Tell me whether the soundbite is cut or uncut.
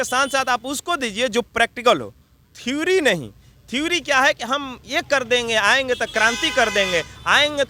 uncut